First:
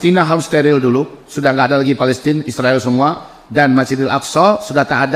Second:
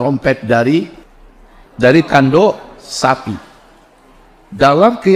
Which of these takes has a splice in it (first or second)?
second